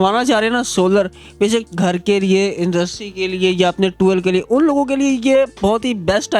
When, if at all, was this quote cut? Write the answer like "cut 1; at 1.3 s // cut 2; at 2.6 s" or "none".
none